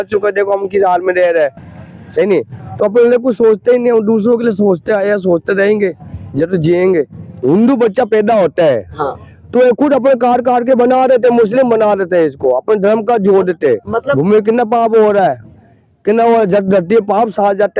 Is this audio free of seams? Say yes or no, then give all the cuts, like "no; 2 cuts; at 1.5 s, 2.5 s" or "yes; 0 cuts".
no; 2 cuts; at 7.4 s, 14.1 s